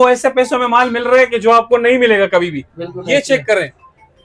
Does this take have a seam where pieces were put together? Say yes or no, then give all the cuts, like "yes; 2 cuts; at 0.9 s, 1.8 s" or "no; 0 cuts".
no; 0 cuts